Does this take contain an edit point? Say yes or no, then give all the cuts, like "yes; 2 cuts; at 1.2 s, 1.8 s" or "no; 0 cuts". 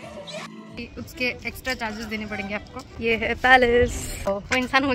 yes; 3 cuts; at 0.9 s, 2.9 s, 4.3 s